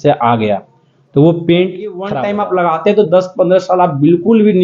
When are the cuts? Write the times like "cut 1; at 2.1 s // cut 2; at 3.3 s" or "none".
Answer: cut 1; at 2.1 s